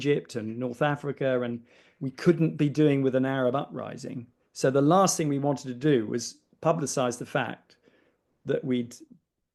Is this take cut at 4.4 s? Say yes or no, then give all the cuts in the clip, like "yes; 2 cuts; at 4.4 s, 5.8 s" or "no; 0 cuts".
no; 0 cuts